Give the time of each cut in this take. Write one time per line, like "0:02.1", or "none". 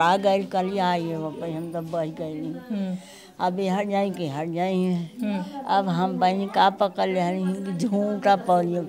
none